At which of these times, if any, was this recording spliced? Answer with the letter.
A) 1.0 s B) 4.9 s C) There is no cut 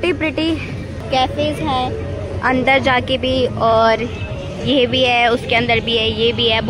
A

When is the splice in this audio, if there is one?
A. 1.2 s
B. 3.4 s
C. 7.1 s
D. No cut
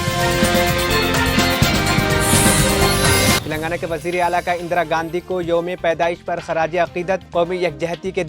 B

